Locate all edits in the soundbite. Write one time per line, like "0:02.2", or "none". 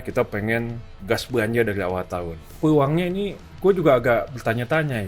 0:02.5